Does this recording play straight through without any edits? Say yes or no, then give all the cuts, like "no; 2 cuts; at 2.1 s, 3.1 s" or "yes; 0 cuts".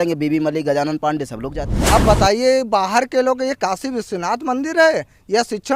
no; 1 cut; at 1.7 s